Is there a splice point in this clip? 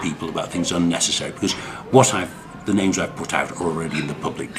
no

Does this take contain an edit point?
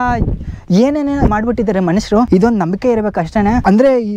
yes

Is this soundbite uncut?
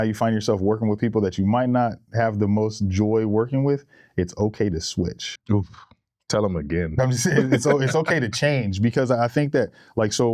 yes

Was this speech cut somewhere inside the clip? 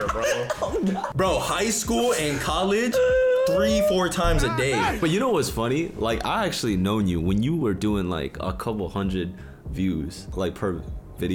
yes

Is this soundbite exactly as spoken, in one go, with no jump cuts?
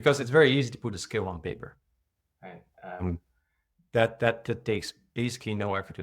yes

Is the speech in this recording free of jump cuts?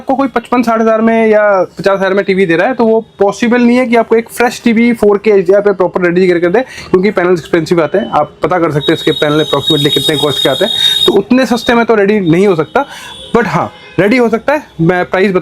yes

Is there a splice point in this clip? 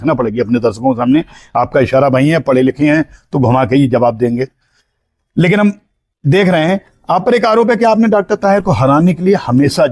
no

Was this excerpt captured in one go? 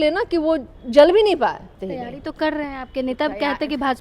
no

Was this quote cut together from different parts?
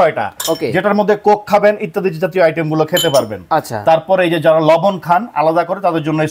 no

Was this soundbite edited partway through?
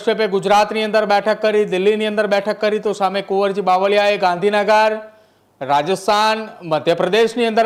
no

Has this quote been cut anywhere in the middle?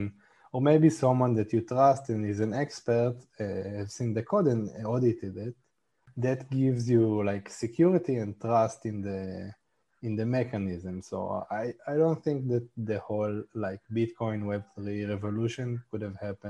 yes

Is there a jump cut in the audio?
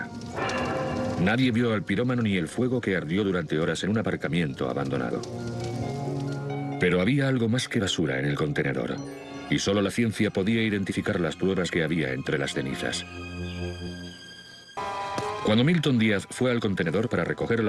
no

